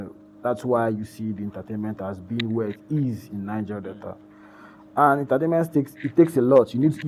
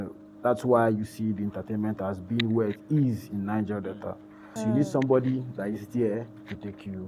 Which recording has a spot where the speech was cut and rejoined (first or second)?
second